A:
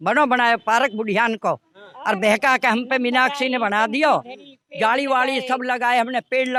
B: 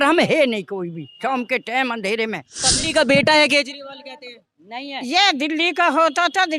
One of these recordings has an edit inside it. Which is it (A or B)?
B